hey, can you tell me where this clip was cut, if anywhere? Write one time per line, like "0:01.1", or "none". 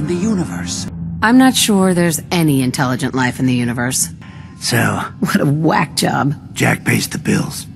0:01.1
0:04.1
0:06.4